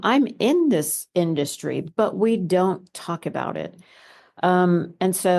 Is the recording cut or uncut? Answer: uncut